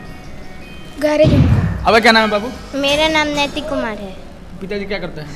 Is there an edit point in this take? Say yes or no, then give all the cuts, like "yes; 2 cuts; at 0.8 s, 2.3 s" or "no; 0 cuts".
yes; 1 cut; at 1.6 s